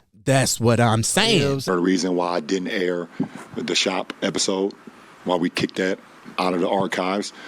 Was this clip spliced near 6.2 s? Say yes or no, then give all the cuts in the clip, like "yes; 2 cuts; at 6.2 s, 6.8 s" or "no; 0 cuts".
yes; 2 cuts; at 1.6 s, 6.2 s